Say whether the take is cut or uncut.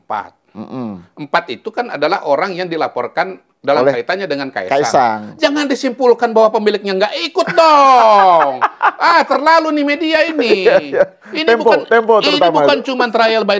uncut